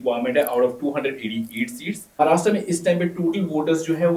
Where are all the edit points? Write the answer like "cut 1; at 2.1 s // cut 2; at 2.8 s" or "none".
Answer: none